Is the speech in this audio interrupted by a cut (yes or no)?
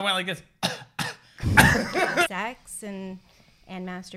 yes